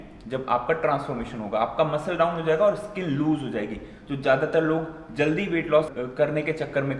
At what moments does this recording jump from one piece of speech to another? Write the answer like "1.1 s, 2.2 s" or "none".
5.9 s